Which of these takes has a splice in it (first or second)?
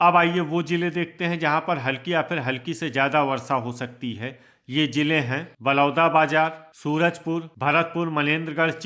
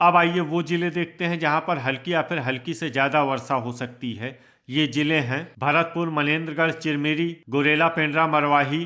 first